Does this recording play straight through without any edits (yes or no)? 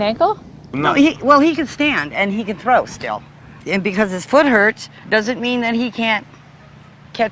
yes